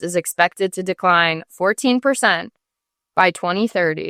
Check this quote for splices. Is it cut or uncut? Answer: uncut